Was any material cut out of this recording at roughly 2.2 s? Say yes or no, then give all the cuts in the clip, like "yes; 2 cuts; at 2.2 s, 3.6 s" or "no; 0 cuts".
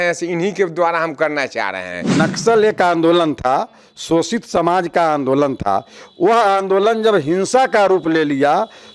yes; 1 cut; at 2.2 s